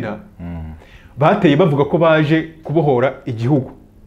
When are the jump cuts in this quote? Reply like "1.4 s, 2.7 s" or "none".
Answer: none

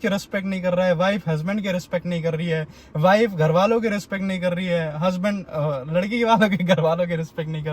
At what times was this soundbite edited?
none

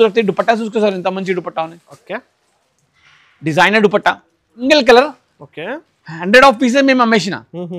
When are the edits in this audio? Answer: 4.7 s

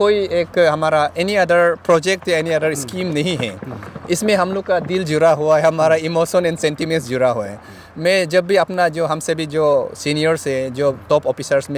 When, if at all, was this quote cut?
none

